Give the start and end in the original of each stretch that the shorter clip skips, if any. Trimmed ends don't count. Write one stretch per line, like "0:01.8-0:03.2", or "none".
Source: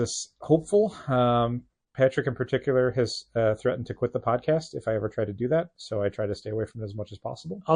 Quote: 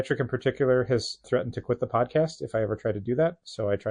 0:03.3-0:03.6